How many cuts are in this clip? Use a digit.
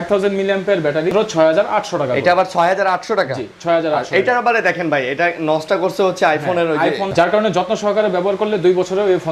2